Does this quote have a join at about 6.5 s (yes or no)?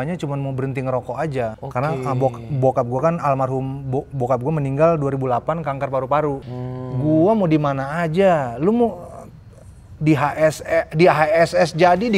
yes